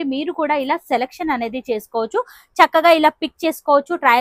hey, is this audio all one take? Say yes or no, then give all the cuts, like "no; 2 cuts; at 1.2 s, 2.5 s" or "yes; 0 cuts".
yes; 0 cuts